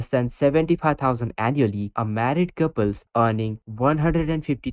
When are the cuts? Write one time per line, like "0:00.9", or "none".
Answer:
0:01.9